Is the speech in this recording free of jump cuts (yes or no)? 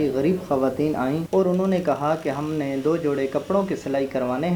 no